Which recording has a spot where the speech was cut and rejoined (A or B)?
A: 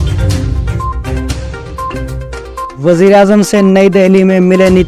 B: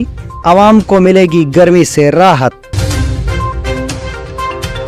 B